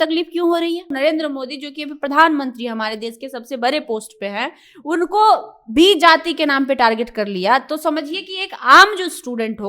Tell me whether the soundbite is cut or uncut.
cut